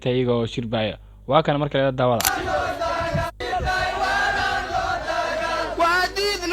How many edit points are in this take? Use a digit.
1